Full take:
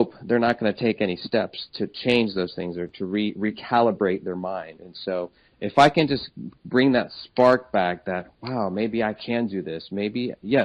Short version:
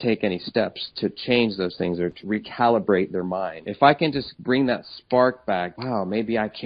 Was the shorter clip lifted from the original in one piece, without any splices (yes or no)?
no